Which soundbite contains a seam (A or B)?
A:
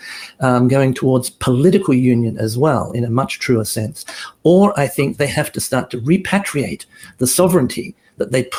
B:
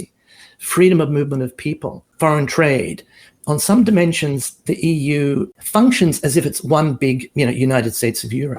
B